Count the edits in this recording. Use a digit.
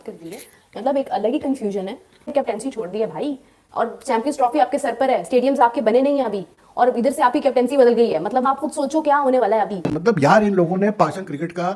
2